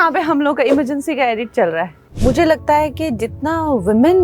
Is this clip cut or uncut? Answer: cut